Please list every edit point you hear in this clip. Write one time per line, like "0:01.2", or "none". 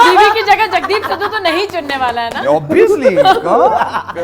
none